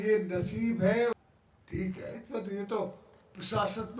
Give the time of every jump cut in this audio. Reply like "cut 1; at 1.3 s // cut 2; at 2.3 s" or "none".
cut 1; at 1.1 s